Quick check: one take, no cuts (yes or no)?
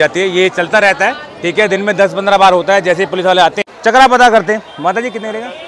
no